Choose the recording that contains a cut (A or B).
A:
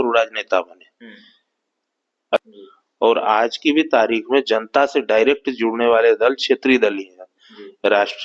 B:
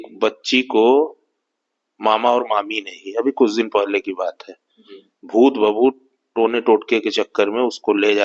A